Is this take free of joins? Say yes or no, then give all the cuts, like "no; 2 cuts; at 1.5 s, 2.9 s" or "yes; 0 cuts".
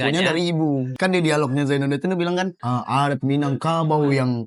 no; 2 cuts; at 0.9 s, 2.6 s